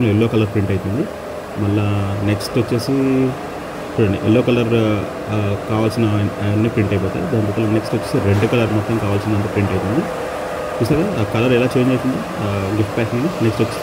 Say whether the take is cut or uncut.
uncut